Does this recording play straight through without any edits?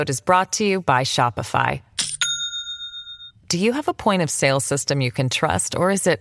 yes; 0 cuts

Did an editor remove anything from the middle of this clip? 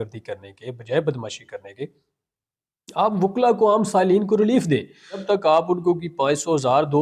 yes; 1 cut; at 5.2 s

